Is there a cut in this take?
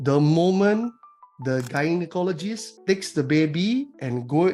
yes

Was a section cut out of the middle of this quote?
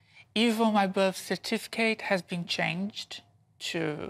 no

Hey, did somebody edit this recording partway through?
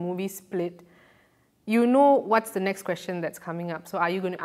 no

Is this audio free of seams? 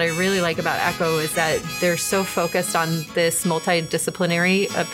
yes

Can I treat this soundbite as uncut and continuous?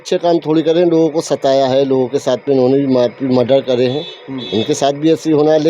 yes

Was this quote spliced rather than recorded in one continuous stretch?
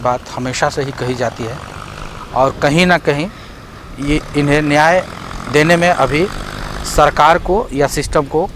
no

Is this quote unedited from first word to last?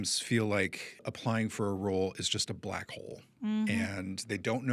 no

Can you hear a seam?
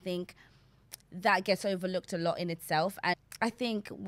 yes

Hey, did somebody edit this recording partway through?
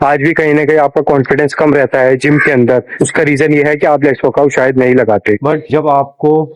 yes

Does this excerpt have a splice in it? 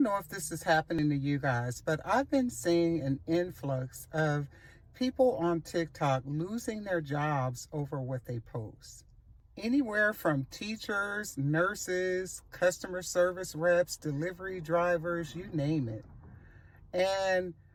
no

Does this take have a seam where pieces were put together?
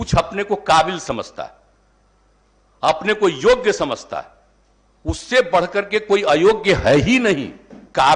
no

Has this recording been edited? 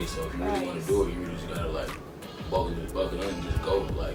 no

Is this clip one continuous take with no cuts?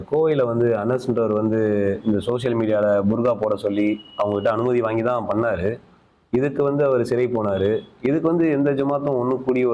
yes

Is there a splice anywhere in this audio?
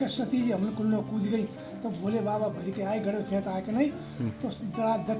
no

